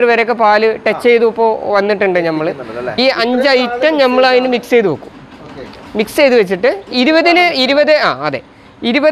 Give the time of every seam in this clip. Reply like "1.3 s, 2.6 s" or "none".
2.9 s